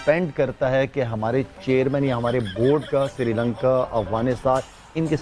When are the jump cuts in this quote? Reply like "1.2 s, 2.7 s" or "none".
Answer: none